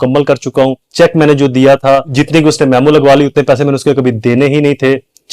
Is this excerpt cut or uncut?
cut